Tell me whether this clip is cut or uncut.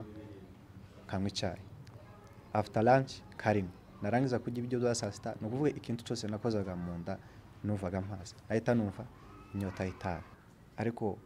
cut